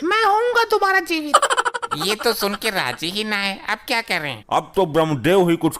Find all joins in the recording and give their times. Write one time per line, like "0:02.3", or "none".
none